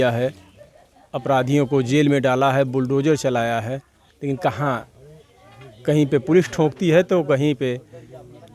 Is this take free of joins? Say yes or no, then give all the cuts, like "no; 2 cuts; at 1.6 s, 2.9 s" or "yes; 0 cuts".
yes; 0 cuts